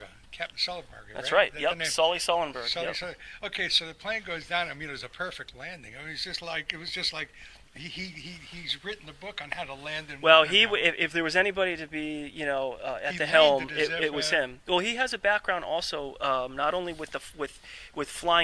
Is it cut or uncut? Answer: cut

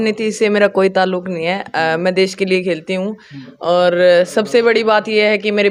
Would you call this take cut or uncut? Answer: uncut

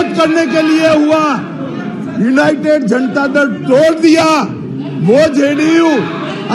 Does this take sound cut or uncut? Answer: uncut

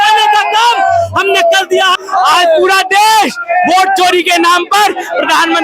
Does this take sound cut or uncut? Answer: cut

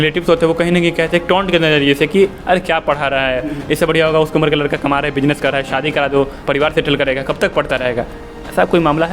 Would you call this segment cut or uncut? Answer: cut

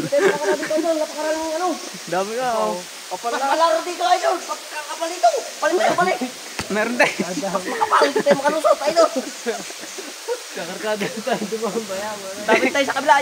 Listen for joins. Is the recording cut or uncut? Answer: uncut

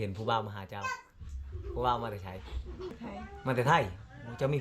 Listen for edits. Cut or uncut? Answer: cut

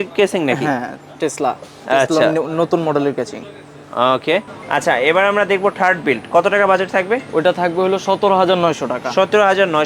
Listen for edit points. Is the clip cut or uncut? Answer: cut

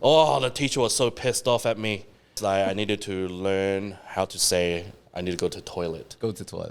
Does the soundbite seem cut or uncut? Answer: cut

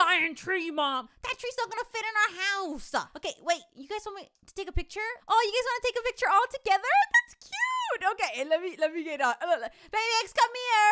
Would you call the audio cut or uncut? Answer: cut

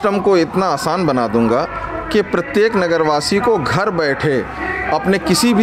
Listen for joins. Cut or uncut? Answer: uncut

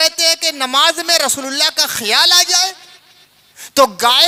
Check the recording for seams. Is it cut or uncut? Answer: uncut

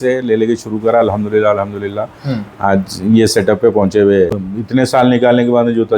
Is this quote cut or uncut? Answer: cut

